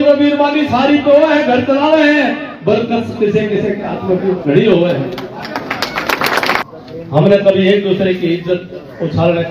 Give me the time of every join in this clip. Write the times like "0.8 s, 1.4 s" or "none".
6.6 s